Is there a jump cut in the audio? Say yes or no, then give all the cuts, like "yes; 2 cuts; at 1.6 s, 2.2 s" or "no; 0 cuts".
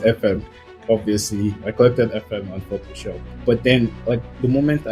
yes; 1 cut; at 1.6 s